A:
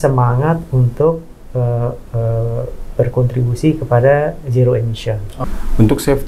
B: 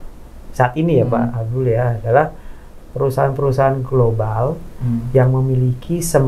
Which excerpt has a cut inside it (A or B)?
A